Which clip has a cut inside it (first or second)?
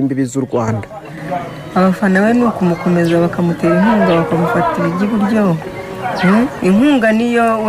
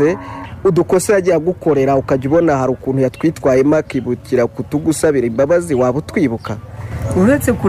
second